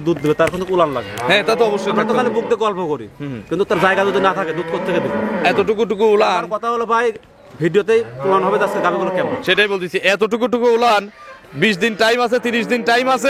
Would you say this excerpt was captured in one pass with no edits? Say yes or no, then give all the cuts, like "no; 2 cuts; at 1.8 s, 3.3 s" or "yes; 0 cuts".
yes; 0 cuts